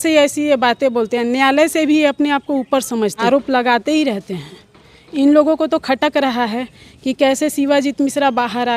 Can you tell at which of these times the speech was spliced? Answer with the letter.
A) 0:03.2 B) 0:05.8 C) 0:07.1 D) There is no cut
A